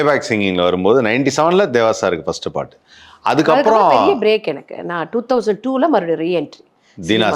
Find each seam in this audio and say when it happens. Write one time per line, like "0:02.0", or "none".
none